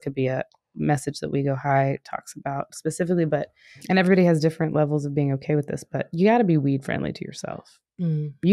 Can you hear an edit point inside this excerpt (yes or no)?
yes